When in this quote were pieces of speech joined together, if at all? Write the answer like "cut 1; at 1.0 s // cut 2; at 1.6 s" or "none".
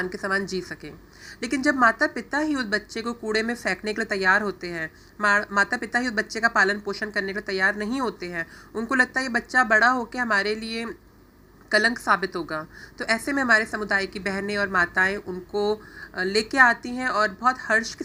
none